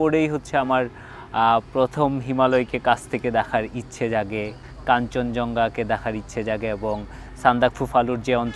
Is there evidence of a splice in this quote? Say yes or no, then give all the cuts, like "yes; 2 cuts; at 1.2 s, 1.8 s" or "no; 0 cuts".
no; 0 cuts